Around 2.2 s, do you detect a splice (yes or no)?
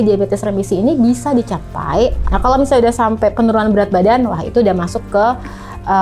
yes